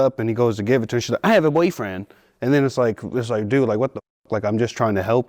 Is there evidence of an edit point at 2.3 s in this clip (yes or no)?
no